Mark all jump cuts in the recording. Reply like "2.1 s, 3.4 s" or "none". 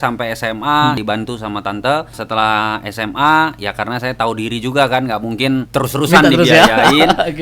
1.0 s, 2.1 s, 5.7 s

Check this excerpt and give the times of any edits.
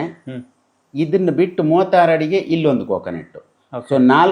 none

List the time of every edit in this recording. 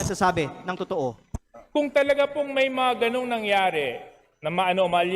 1.2 s

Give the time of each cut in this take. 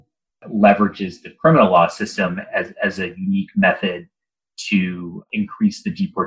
5.2 s

